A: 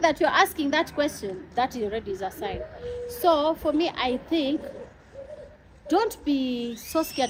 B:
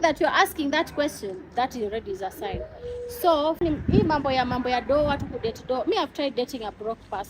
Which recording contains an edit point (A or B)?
B